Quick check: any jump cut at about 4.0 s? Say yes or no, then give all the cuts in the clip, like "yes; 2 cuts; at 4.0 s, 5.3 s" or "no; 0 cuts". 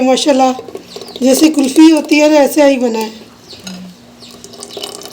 yes; 1 cut; at 4.0 s